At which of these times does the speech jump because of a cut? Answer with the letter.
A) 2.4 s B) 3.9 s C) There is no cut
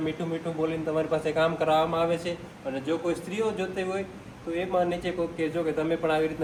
C